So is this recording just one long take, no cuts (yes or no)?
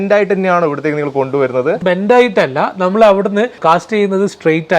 no